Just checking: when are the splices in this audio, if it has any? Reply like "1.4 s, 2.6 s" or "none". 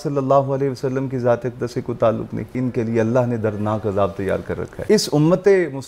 2.5 s, 4.7 s